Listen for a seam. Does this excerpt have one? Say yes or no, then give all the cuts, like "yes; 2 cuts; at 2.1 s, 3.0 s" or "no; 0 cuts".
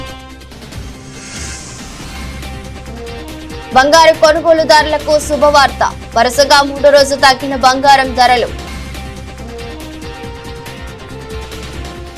no; 0 cuts